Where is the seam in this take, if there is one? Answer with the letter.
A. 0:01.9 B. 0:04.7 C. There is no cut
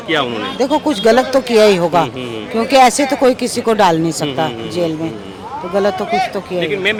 C